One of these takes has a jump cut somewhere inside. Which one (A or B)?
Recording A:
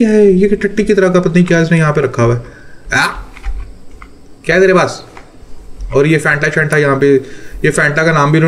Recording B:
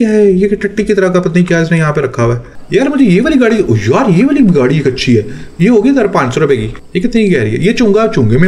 B